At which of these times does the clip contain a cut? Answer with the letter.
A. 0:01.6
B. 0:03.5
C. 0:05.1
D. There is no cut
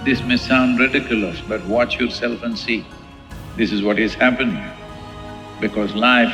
D